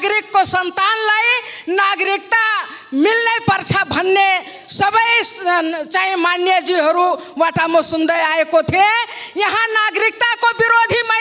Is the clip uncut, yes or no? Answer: yes